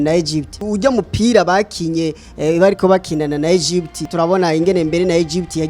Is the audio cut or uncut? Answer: cut